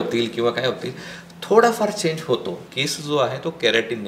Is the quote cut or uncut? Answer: cut